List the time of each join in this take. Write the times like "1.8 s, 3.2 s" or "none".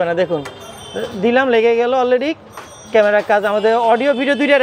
none